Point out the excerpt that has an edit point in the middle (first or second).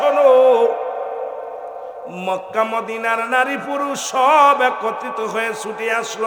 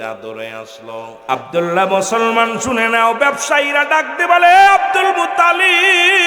second